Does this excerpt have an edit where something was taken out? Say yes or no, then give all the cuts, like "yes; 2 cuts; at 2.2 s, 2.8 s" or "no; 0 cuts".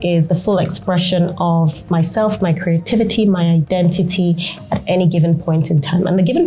no; 0 cuts